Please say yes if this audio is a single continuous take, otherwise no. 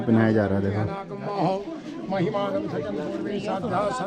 yes